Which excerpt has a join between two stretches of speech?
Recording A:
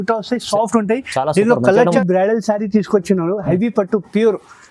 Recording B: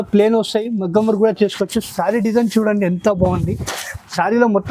A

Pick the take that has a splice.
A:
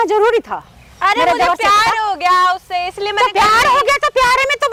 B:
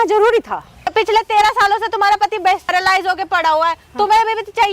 B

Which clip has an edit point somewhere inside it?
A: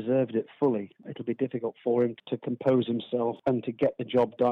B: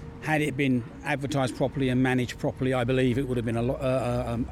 A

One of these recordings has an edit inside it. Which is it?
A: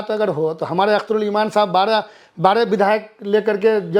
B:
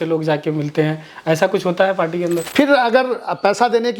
B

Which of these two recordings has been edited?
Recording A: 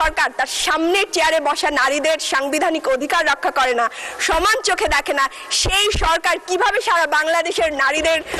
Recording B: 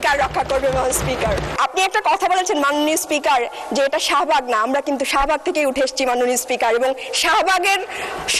B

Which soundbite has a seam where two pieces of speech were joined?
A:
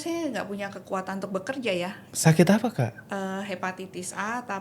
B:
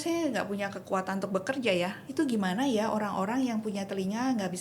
B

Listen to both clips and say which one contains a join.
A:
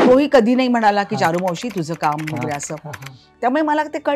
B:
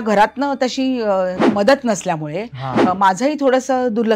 B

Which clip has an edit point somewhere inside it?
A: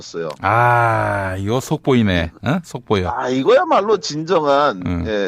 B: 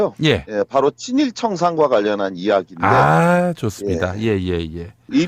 A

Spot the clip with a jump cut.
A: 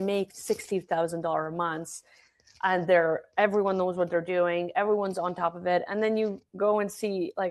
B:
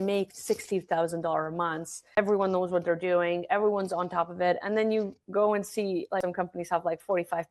B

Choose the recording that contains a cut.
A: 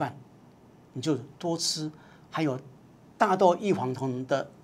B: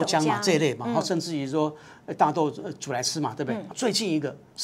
B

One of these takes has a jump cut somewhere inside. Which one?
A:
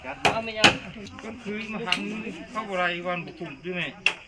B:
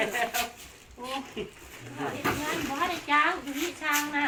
A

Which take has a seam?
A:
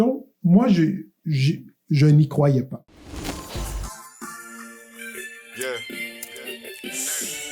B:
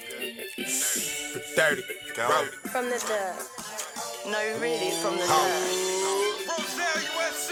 A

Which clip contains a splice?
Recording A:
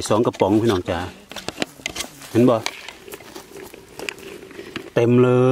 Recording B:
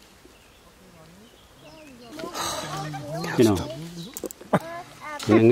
B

